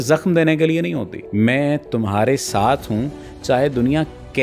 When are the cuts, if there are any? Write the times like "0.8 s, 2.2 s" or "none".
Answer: 1.1 s